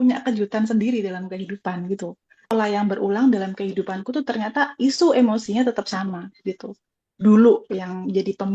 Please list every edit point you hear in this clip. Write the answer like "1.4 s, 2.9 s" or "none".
2.5 s